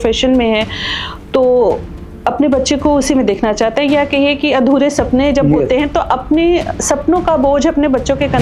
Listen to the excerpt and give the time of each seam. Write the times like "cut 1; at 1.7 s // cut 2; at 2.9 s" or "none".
none